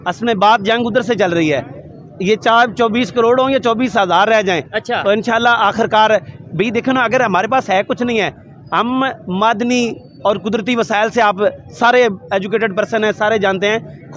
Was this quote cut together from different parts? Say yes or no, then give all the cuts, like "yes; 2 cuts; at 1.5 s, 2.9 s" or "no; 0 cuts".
no; 0 cuts